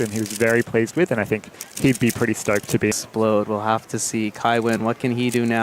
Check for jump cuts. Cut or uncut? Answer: cut